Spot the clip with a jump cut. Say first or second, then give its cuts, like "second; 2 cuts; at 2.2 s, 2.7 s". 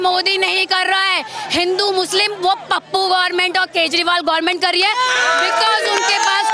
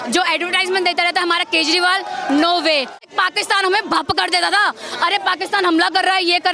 second; 1 cut; at 3.0 s